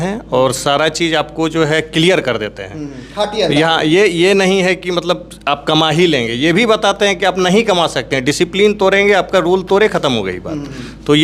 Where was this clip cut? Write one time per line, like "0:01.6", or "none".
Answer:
none